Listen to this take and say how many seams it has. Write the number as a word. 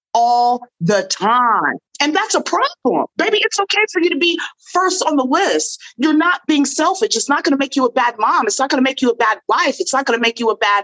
two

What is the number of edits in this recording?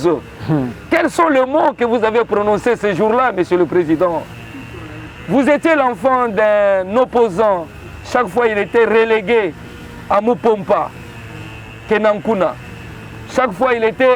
zero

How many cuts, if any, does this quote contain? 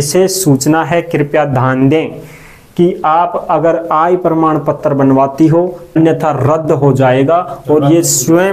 one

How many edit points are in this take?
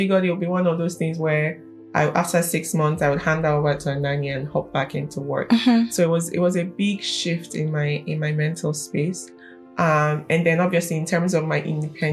zero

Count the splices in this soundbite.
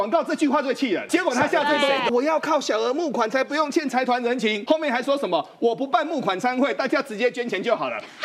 three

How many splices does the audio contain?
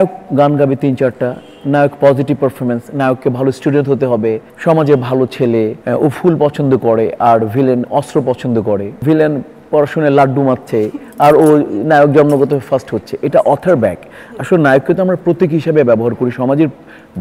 three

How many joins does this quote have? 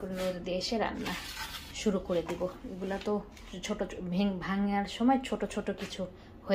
zero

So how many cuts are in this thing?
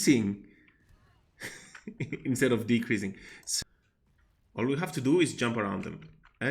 one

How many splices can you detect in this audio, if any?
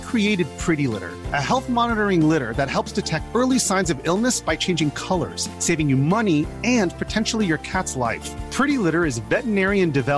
zero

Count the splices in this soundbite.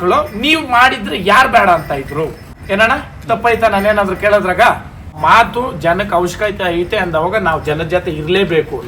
two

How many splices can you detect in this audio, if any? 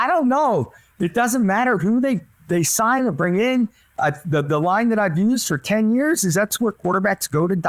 zero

